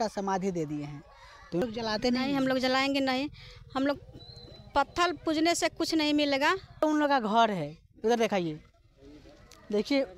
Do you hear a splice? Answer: yes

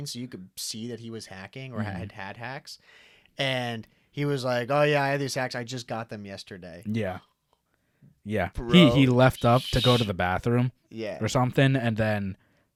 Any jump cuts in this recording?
no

